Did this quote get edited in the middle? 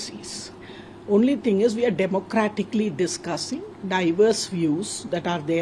no; 0 cuts

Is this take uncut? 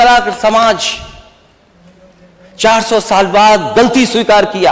yes; 0 cuts

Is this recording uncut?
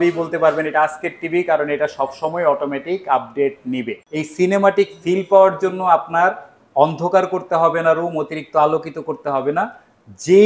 no; 1 cut; at 4.0 s

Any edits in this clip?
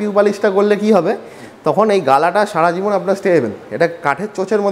no; 0 cuts

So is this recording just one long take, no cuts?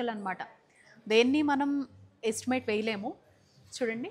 yes; 0 cuts

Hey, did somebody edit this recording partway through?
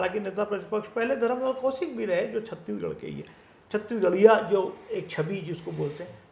no; 0 cuts

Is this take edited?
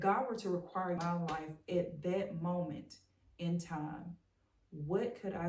yes; 1 cut; at 1.0 s

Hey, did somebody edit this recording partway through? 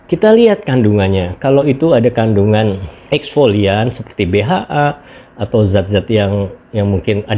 yes; 1 cut; at 2.9 s

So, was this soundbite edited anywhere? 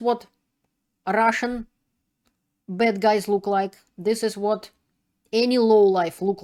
no; 0 cuts

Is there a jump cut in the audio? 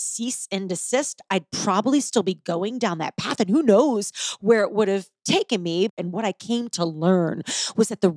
yes; 1 cut; at 5.9 s

